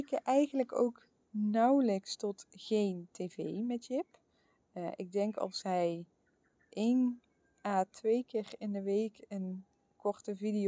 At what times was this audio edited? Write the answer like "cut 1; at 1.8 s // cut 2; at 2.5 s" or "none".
none